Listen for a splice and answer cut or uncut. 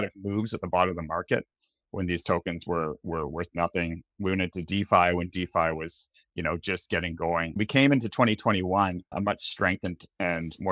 cut